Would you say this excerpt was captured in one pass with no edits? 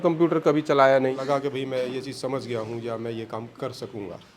no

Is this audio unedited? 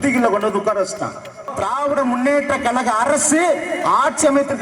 no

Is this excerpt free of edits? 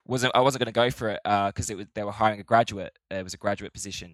yes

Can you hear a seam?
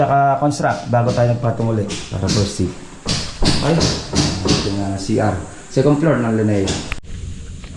no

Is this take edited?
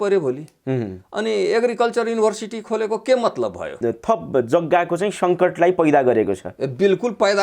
yes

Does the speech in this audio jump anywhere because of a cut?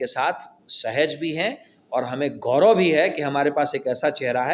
no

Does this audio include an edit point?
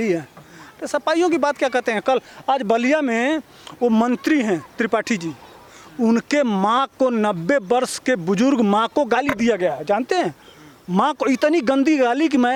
no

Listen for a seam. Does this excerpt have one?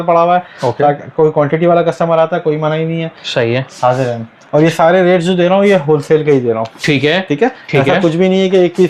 no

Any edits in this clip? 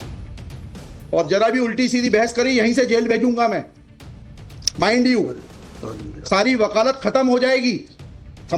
yes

